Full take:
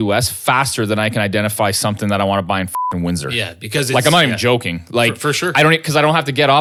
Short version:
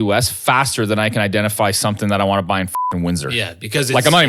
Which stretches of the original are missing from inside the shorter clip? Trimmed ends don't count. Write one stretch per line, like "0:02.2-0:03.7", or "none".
none